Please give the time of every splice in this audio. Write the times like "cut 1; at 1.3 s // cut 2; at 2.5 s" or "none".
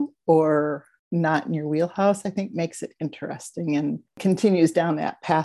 cut 1; at 0.9 s // cut 2; at 4.2 s

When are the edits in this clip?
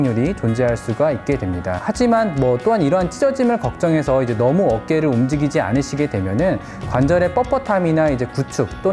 none

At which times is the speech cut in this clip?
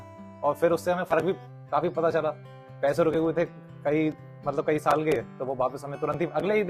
none

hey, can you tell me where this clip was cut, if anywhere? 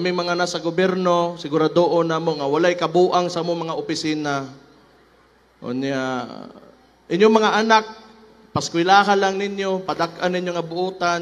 none

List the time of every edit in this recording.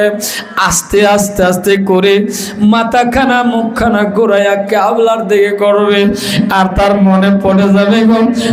none

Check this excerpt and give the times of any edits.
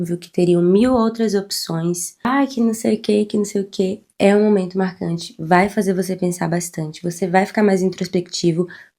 cut 1; at 2.1 s

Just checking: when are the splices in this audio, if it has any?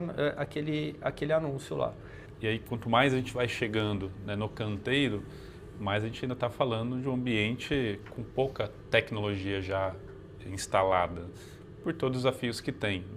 cut 1; at 2.3 s

